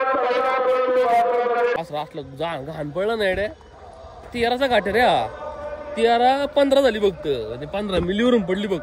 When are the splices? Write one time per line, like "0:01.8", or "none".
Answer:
0:01.8